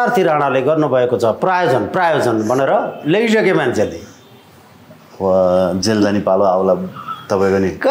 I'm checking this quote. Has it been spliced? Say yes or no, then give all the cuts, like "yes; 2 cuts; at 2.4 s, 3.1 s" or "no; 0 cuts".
no; 0 cuts